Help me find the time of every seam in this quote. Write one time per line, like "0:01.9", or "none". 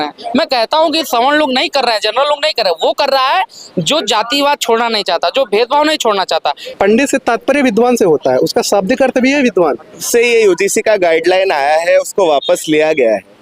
0:06.6
0:10.0